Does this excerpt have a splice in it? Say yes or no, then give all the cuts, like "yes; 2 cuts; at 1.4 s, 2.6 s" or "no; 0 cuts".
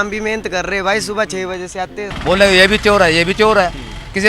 yes; 1 cut; at 2.0 s